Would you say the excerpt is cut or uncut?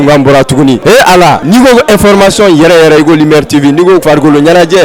cut